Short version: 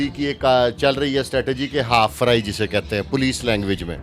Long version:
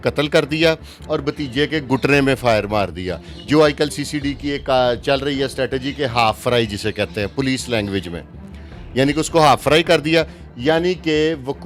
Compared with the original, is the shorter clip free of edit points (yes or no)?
yes